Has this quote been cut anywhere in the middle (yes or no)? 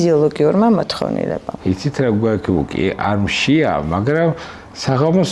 yes